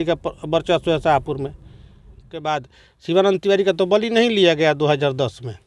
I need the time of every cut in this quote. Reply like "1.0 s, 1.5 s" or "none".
2.4 s